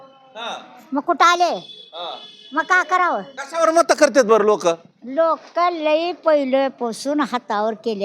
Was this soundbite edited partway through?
yes; 1 cut; at 3.4 s

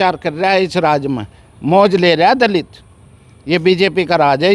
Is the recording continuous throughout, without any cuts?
yes; 0 cuts

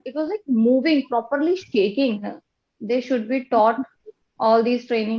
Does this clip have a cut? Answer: yes; 1 cut; at 2.4 s

